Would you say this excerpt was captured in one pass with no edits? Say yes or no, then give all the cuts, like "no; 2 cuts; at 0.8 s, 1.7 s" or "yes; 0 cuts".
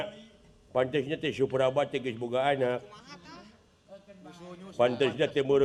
yes; 0 cuts